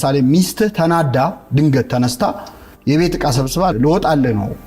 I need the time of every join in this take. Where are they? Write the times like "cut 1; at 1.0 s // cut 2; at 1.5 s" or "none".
cut 1; at 3.7 s

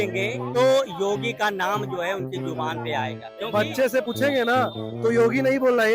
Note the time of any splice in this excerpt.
cut 1; at 4.0 s

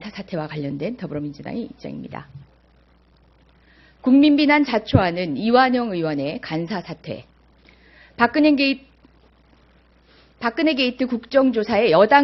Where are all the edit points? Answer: none

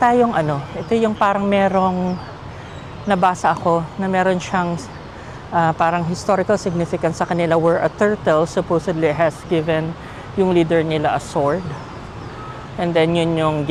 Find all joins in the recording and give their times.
none

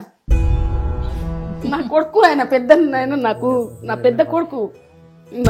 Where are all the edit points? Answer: none

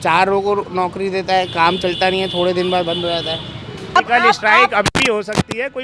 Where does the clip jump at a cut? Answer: cut 1; at 4.0 s

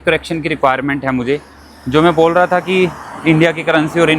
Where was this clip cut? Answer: none

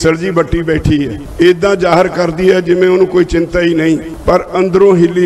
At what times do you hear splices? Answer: cut 1; at 1.2 s // cut 2; at 4.1 s

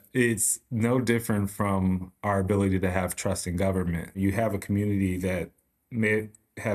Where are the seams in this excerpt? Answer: cut 1; at 4.2 s

